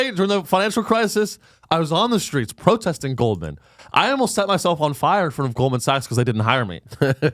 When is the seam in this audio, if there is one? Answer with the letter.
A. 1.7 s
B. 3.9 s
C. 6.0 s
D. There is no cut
D